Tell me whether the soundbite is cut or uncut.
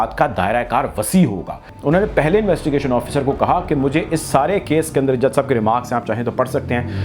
cut